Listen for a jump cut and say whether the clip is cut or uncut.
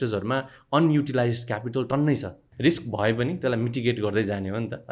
cut